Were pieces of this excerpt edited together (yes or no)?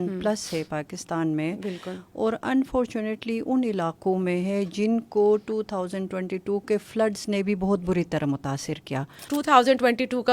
yes